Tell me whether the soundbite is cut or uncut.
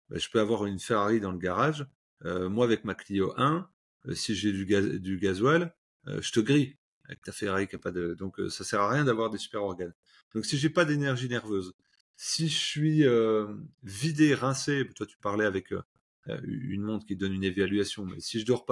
uncut